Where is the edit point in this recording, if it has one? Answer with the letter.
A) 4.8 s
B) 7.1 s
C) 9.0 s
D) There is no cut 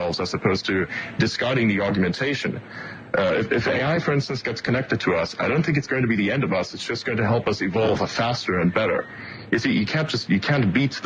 D